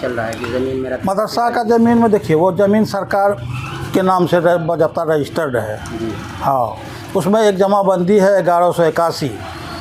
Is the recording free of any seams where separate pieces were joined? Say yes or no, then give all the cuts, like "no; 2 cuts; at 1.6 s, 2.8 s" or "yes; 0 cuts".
yes; 0 cuts